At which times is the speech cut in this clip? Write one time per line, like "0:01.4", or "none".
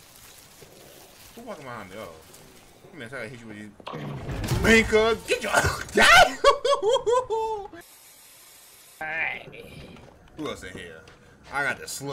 0:09.0